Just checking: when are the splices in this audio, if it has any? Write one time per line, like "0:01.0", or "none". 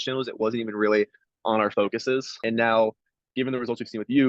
0:02.3